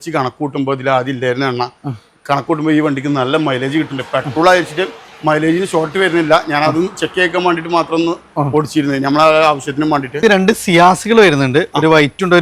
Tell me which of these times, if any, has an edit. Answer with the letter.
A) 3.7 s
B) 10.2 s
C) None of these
B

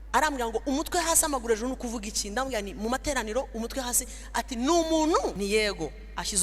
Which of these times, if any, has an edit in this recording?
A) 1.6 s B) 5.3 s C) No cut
B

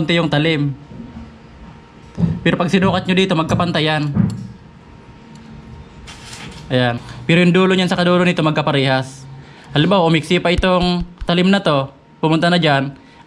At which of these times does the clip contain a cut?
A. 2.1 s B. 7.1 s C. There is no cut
B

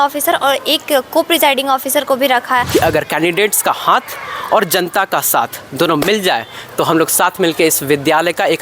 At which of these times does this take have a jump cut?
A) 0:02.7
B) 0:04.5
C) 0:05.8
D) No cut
A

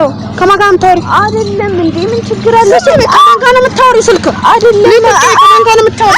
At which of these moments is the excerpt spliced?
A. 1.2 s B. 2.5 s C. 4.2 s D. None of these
C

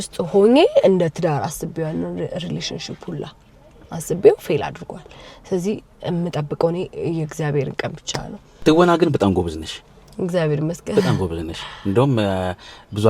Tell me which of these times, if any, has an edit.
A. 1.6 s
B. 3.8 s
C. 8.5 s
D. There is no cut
C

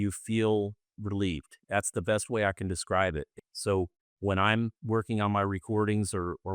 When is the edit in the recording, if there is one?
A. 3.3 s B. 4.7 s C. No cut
A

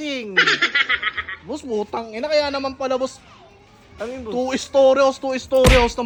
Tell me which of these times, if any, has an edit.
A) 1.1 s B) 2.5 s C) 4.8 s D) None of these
D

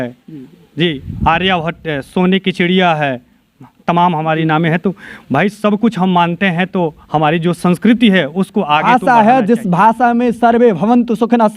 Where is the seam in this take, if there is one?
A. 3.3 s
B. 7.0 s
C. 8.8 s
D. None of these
C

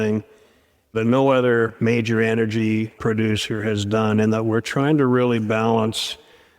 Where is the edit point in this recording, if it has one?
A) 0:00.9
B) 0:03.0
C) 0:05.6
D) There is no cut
A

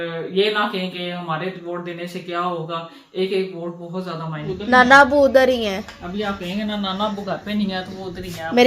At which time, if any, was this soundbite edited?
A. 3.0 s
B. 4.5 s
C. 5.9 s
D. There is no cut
B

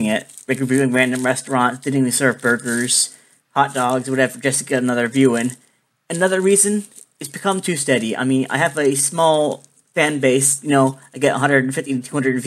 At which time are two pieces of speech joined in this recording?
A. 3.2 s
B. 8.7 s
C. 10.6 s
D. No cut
B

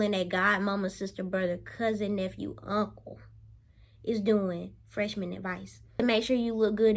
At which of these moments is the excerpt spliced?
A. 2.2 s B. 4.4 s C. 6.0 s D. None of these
C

